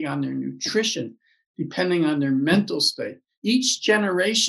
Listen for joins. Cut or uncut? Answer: cut